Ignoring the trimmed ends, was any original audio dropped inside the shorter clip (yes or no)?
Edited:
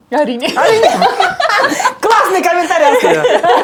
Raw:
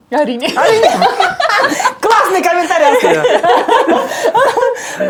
no